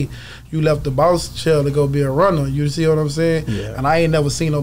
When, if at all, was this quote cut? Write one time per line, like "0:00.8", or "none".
none